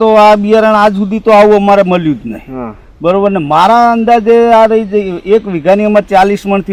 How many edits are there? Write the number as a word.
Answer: zero